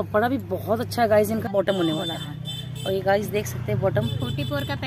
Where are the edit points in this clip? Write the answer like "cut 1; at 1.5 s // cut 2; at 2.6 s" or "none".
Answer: cut 1; at 1.5 s